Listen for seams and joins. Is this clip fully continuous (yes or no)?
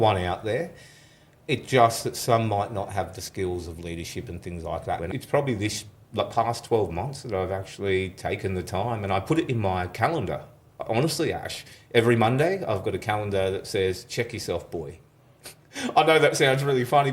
no